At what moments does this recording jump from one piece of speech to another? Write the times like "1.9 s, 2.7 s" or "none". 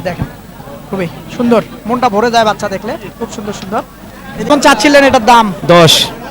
4.8 s